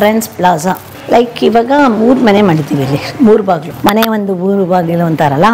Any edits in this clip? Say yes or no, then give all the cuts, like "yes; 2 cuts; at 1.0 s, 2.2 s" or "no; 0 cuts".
yes; 2 cuts; at 0.9 s, 3.7 s